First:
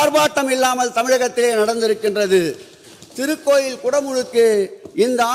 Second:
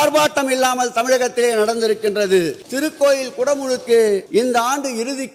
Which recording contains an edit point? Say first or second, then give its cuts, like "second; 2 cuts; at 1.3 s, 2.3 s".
second; 2 cuts; at 2.6 s, 4.3 s